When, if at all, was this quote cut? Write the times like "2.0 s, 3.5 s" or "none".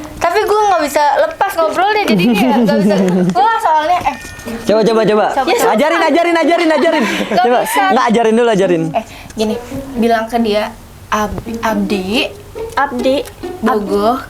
4.6 s